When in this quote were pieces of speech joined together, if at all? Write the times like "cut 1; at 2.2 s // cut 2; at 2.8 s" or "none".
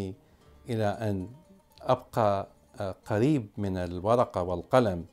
none